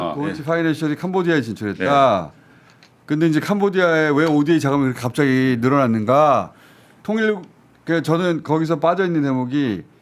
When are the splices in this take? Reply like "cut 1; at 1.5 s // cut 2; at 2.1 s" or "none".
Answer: none